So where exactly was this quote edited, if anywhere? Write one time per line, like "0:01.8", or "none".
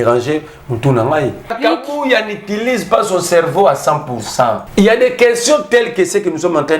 0:01.6
0:04.6